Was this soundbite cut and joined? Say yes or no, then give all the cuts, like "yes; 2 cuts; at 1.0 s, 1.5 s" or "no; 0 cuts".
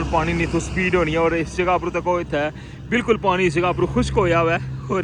no; 0 cuts